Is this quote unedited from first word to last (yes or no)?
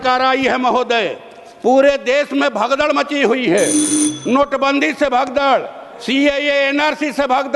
yes